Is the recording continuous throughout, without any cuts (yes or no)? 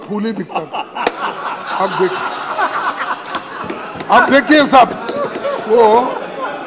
yes